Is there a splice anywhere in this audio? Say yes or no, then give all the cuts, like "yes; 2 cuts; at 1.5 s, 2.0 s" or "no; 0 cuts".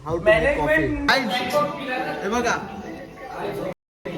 yes; 1 cut; at 1.0 s